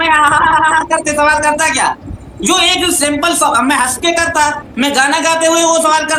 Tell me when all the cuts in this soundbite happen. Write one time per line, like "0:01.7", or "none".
none

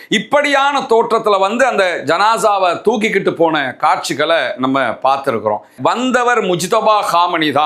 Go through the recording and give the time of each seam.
0:05.7

